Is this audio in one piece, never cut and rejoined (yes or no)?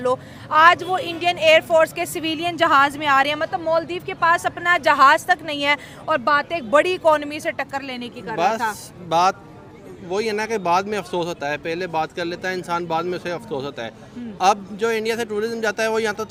yes